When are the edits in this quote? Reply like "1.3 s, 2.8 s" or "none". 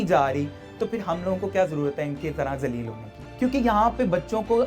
3.3 s